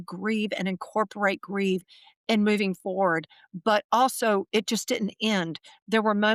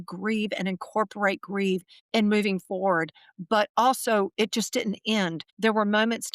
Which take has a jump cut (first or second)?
second